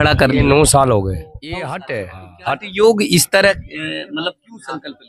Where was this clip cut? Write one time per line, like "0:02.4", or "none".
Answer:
0:01.8

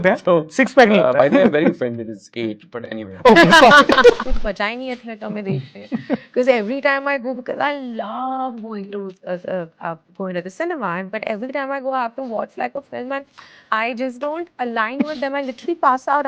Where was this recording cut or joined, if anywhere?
0:04.2
0:13.7

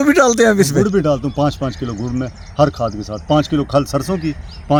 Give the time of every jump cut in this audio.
none

